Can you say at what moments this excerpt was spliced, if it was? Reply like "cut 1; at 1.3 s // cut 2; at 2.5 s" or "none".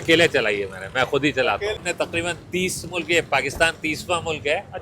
cut 1; at 1.8 s